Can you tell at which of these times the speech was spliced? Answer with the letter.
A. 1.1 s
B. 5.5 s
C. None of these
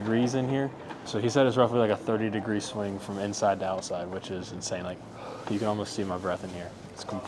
A